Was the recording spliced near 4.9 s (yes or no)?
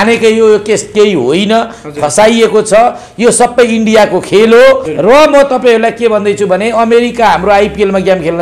yes